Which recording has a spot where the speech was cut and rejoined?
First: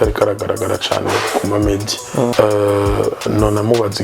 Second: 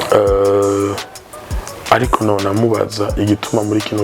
first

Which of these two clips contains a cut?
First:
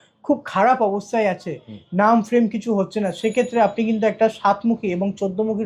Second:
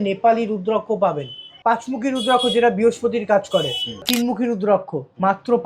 second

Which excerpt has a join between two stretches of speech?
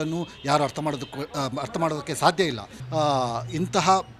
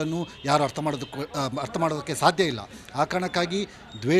first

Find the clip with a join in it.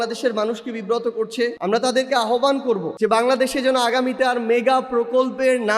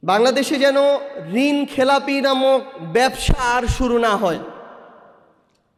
first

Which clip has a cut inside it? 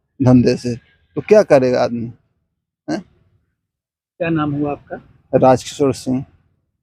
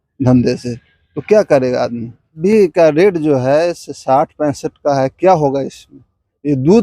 second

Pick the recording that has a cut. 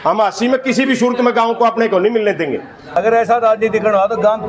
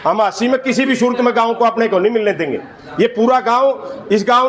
first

